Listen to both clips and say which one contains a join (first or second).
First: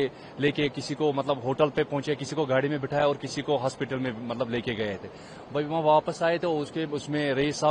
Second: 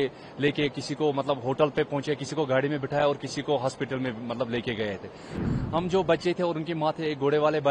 second